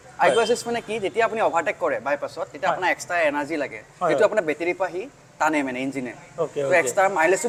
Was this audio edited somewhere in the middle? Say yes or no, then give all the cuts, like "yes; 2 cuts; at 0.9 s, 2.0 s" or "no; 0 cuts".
no; 0 cuts